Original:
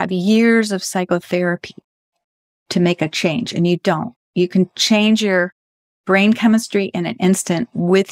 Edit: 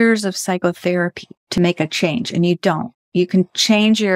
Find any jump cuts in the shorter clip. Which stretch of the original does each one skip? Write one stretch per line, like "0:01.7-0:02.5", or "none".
0:02.1-0:02.8